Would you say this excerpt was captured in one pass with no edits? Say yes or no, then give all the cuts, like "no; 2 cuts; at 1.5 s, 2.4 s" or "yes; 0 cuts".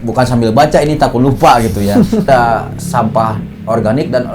no; 1 cut; at 2.3 s